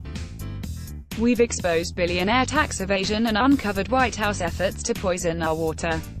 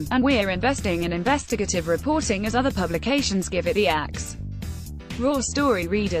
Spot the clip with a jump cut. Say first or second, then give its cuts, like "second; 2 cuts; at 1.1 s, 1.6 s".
first; 1 cut; at 1.2 s